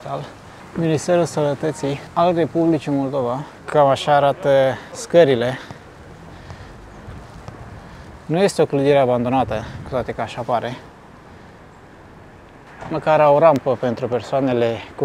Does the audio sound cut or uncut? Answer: uncut